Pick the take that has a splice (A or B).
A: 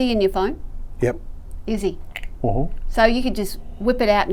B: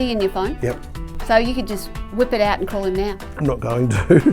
B